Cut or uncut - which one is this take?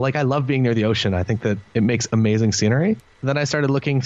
cut